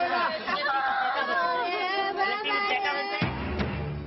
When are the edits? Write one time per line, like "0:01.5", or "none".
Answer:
none